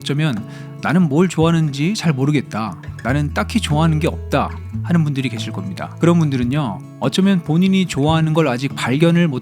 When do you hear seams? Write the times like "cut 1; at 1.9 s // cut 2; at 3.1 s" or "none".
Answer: cut 1; at 5.8 s